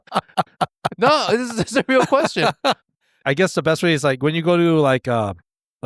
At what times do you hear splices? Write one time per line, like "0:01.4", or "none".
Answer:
0:03.2